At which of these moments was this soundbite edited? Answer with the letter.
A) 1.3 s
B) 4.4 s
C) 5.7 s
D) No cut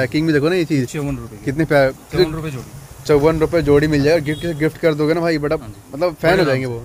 D